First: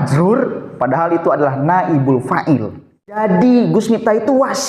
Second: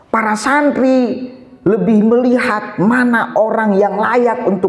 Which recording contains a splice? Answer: first; 1 cut; at 3.2 s

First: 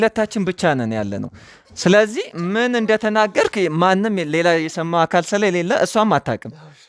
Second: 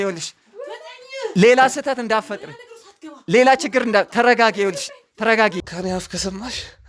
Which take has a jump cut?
second; 1 cut; at 5.6 s

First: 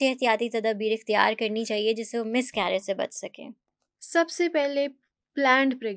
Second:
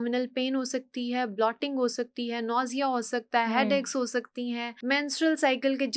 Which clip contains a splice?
second; 1 cut; at 4.7 s

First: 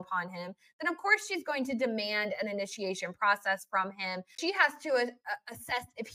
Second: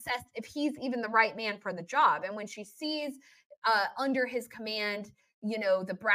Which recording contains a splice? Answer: first; 1 cut; at 4.4 s

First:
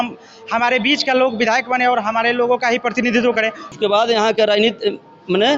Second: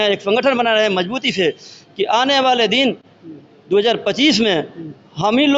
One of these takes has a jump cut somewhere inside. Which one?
first; 1 cut; at 3.7 s

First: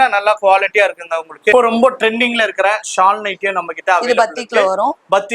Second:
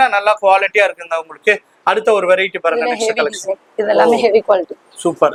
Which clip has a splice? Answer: first; 1 cut; at 1.5 s

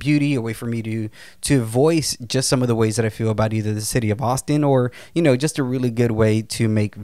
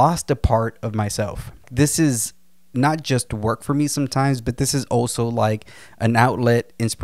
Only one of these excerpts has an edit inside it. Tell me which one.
second; 1 cut; at 1.7 s

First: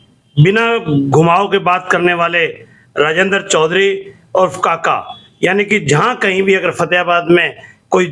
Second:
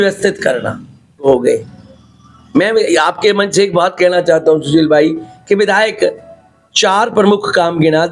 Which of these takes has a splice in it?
second; 1 cut; at 1.3 s

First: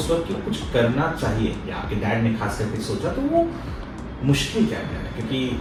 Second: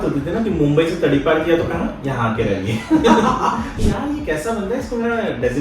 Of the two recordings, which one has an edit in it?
second; 1 cut; at 3.7 s

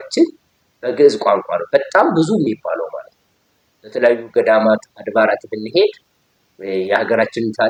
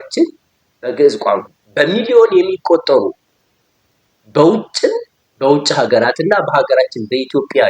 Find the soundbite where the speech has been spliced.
second; 1 cut; at 1.5 s

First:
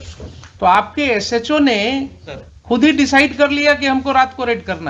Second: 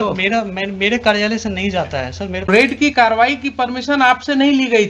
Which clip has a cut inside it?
second; 1 cut; at 2.5 s

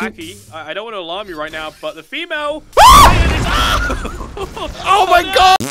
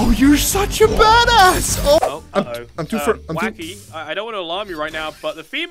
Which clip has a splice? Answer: second; 1 cut; at 2.0 s

